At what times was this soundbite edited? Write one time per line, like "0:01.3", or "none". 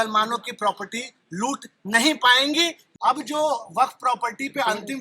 0:02.8